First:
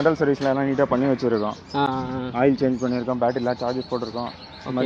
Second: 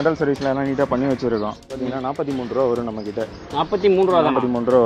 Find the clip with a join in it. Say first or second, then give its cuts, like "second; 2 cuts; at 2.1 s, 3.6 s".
second; 1 cut; at 1.8 s